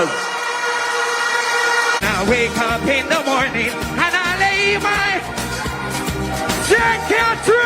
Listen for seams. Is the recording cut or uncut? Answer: cut